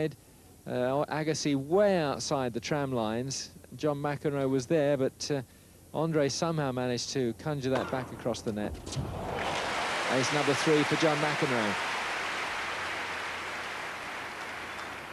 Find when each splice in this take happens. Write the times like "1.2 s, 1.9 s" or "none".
none